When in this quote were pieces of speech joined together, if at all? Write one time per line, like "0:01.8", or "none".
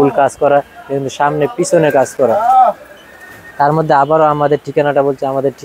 none